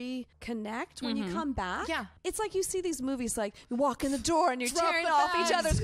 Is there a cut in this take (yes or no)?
yes